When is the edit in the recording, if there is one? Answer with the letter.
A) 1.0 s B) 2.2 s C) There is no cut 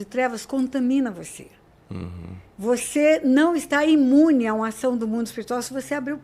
C